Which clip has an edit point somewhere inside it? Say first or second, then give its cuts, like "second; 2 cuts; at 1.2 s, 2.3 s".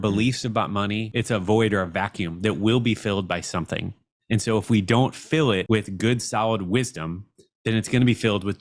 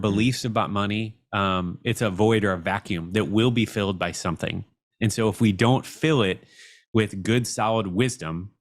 first; 2 cuts; at 1.1 s, 5.6 s